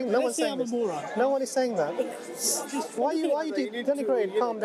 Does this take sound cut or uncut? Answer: uncut